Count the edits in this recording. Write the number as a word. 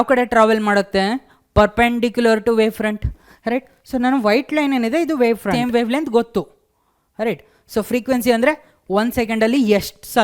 one